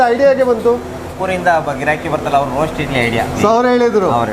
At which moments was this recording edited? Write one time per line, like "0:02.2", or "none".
0:03.3